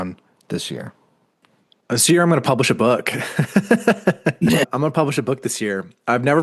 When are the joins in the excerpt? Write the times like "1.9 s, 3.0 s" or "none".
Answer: none